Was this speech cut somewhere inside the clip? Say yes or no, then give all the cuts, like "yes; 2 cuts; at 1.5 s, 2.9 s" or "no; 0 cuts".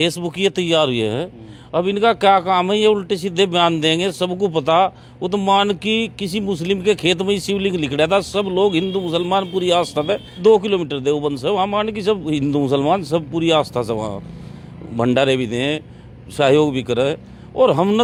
no; 0 cuts